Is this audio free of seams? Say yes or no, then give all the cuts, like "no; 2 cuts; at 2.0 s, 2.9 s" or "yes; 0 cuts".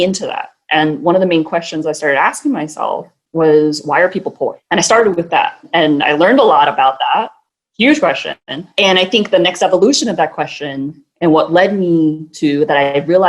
no; 4 cuts; at 3.2 s, 4.6 s, 5.7 s, 8.7 s